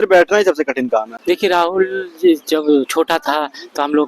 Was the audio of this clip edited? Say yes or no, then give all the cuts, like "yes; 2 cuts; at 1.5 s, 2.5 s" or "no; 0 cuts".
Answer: yes; 1 cut; at 1.1 s